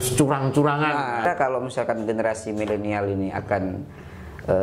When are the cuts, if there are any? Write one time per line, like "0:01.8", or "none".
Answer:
0:01.2

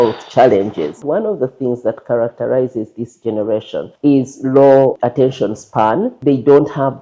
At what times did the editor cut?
0:01.0
0:03.9
0:05.0
0:06.1

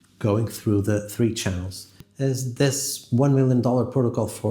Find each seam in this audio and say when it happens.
0:01.9

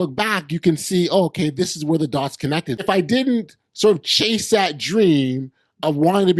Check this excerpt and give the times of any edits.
0:02.7

